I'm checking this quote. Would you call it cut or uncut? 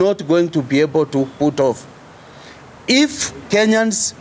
uncut